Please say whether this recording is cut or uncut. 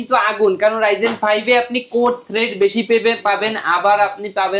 uncut